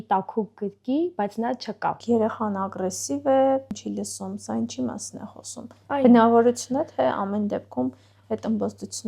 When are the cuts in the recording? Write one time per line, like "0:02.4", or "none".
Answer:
0:02.0
0:03.7

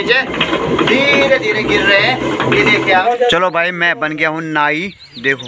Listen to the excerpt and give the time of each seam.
0:03.0

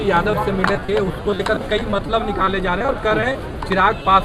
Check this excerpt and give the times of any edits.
none

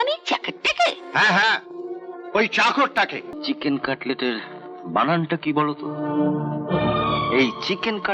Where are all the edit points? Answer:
0:03.3

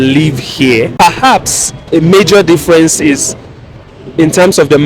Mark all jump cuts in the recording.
0:00.9

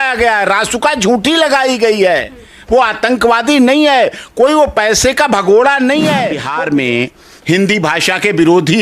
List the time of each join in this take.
0:06.4

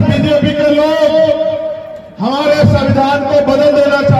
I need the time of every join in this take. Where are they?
none

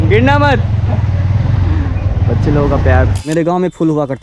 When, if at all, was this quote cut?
0:03.3

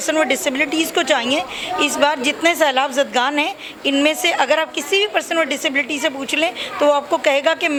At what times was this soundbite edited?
none

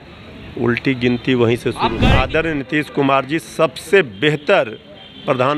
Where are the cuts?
0:02.0

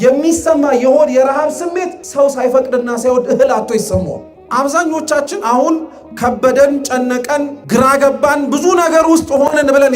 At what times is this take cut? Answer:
0:02.0
0:04.3
0:07.6

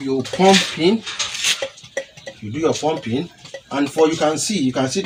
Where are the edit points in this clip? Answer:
none

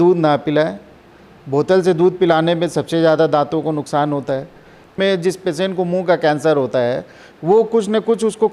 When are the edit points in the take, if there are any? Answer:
0:04.9

